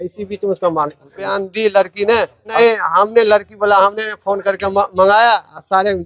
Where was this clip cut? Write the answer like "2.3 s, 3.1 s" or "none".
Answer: 1.3 s, 2.6 s